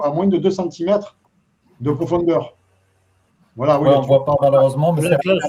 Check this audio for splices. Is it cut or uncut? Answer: uncut